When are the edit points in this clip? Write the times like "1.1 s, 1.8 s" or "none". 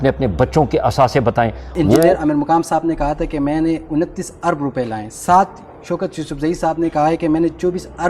2.0 s